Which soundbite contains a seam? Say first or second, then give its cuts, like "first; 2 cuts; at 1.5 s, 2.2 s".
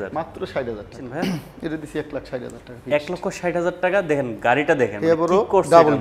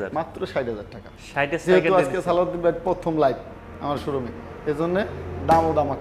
first; 1 cut; at 1.1 s